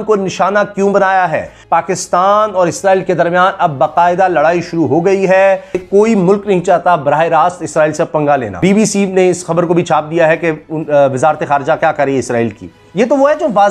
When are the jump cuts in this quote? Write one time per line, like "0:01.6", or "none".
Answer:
0:01.5
0:05.8
0:08.5